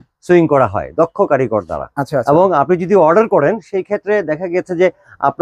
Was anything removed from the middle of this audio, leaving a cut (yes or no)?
no